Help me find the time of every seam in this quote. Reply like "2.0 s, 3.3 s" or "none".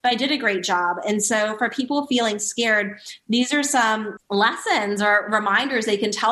4.1 s